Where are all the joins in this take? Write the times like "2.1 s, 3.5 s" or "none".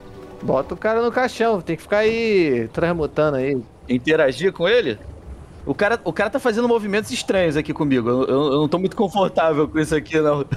none

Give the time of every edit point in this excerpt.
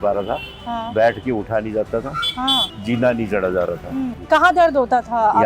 2.7 s, 4.2 s

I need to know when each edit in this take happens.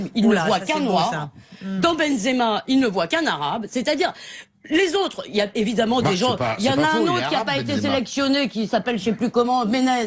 8.3 s

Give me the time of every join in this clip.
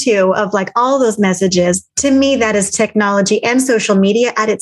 none

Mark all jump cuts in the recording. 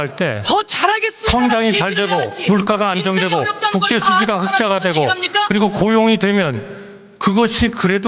none

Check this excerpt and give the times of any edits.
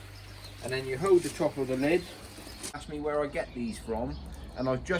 2.7 s

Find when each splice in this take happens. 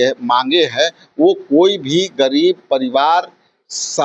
none

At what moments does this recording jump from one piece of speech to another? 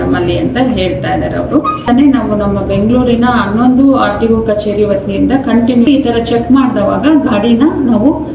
1.9 s, 5.9 s

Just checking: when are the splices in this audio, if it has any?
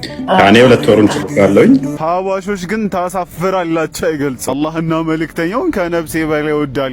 4.5 s

